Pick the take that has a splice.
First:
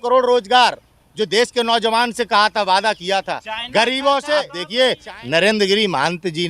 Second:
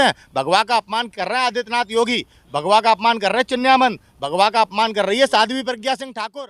first; 1 cut; at 4.6 s

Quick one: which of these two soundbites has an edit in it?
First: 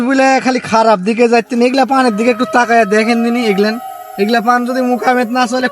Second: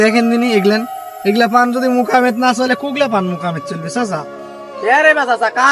second; 1 cut; at 4.5 s

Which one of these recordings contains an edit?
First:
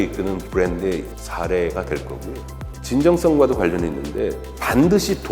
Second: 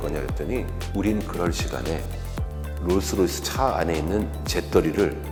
first; 1 cut; at 2.7 s

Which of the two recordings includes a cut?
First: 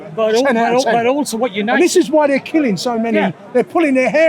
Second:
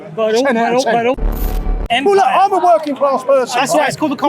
second; 1 cut; at 1.7 s

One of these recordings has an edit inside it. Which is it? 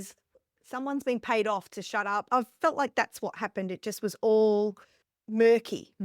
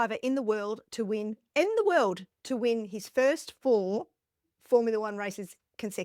first; 1 cut; at 2.2 s

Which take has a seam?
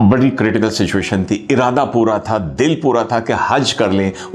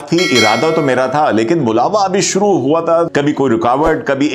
second; 1 cut; at 3.1 s

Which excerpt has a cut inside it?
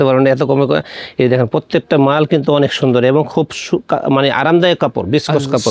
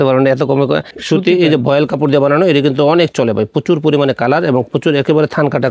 second; 1 cut; at 0.9 s

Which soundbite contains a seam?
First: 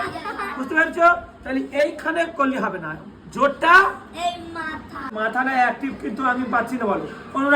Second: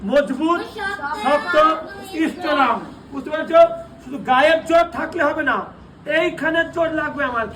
first; 1 cut; at 5.0 s

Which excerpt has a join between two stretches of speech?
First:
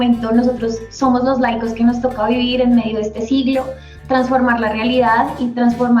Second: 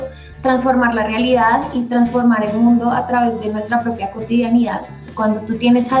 second; 1 cut; at 5.0 s

